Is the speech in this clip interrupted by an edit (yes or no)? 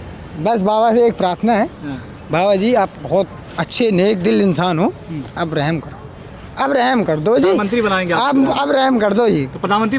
no